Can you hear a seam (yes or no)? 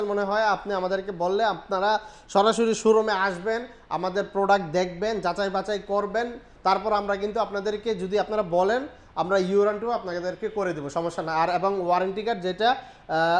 no